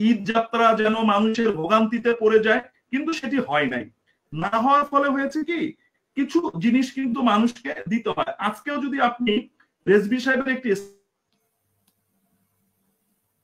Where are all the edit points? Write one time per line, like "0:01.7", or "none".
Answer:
none